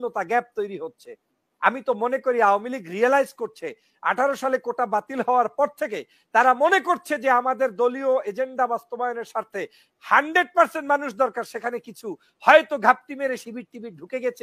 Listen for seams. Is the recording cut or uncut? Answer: uncut